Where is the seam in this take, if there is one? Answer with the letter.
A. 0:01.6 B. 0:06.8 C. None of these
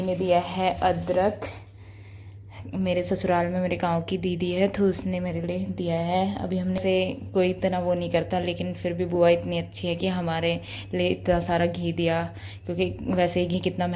B